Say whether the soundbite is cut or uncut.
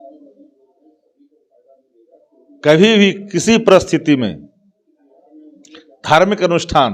uncut